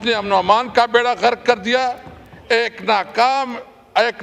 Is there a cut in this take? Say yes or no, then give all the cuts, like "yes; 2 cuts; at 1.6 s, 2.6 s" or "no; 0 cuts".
no; 0 cuts